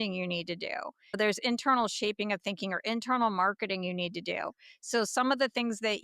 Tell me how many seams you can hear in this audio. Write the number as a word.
one